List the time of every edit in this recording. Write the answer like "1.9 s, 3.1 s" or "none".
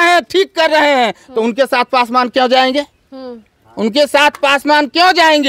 none